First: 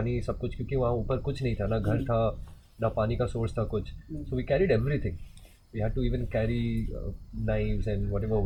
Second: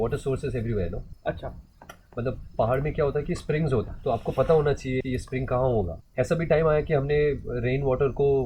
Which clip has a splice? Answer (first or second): second